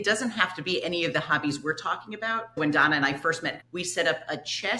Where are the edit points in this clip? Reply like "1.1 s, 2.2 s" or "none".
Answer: 2.6 s, 3.6 s